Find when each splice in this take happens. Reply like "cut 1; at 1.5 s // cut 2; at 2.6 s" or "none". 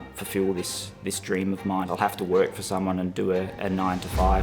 cut 1; at 1.9 s